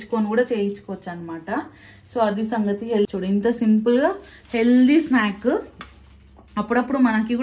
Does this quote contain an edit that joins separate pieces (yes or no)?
yes